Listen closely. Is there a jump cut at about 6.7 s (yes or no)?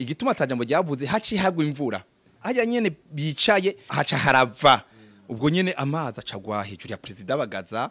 no